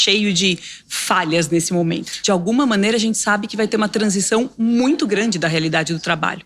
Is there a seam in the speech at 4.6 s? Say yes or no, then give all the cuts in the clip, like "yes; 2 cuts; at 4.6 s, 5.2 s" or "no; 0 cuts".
no; 1 cut; at 2.1 s